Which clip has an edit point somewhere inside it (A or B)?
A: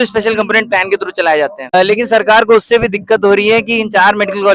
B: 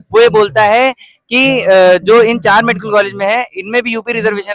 A